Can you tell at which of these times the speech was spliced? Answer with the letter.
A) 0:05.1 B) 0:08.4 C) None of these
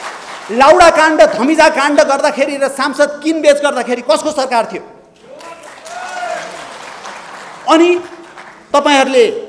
C